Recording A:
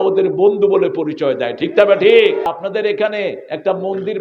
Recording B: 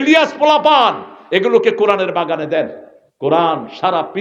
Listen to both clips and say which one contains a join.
A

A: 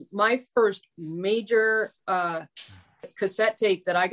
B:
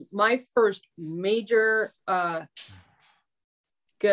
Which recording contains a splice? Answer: A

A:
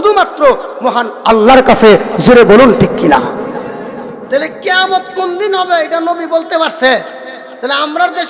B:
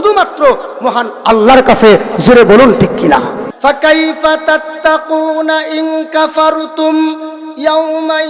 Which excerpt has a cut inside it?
B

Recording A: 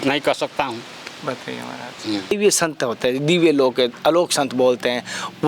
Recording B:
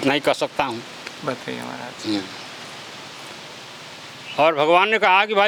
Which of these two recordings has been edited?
A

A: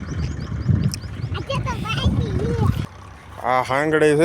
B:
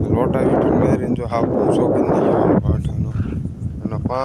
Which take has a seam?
A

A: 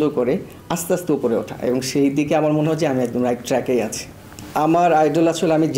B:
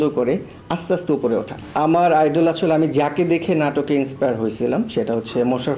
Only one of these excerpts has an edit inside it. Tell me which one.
B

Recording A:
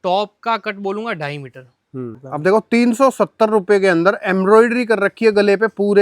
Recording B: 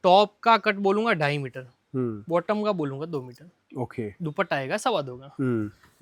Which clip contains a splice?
A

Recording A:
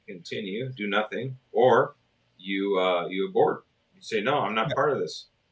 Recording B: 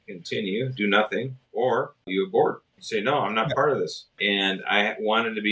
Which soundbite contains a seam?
B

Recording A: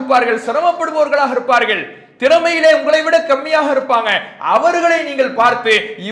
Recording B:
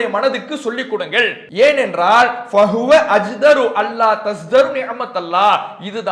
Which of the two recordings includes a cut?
B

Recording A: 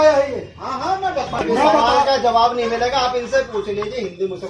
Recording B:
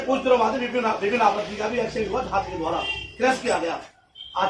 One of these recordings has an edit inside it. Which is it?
A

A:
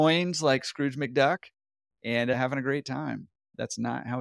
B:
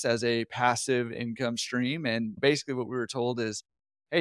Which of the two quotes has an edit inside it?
B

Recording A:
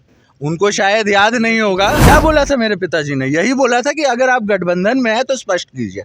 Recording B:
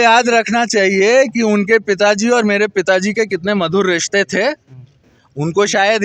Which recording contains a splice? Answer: A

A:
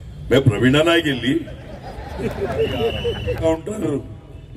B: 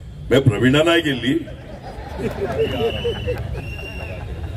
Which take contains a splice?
A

